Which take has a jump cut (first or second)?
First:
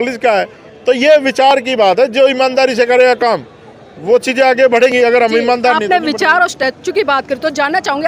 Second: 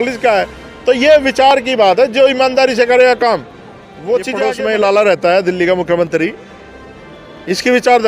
second